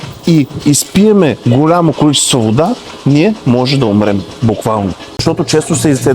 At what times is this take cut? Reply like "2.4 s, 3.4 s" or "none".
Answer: 5.2 s